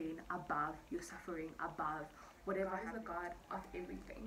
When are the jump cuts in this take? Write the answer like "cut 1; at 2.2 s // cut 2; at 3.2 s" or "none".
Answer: cut 1; at 2.9 s